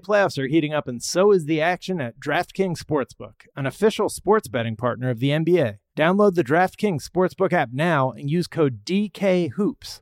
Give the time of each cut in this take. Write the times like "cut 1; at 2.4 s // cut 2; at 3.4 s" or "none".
cut 1; at 5.8 s